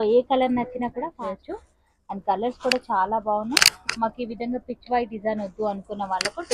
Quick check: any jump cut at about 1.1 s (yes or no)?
yes